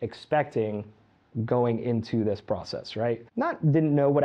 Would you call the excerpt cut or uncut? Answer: cut